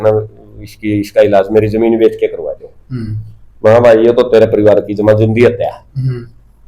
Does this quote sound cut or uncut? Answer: uncut